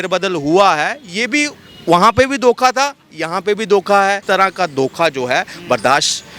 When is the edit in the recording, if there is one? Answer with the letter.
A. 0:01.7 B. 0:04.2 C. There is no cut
B